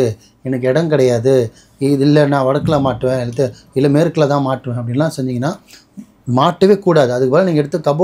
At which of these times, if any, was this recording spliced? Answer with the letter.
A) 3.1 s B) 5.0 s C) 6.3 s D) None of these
D